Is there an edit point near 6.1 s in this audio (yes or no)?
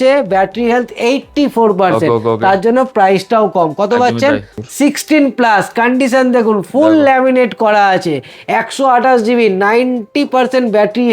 no